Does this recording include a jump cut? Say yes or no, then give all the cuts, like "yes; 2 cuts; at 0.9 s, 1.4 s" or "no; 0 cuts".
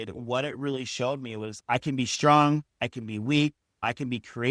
yes; 1 cut; at 1.5 s